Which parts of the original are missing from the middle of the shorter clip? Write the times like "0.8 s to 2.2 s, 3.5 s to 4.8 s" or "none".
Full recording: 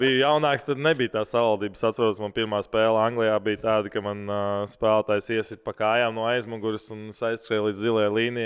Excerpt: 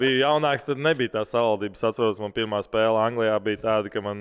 none